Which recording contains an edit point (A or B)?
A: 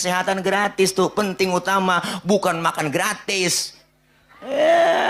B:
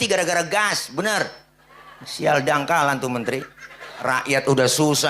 B